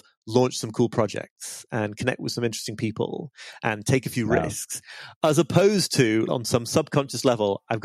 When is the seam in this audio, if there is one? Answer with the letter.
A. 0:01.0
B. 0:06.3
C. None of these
B